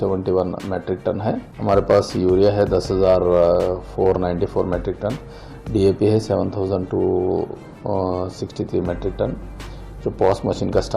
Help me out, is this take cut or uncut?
cut